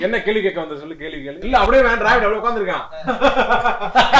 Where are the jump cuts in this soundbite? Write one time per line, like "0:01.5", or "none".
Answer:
0:01.4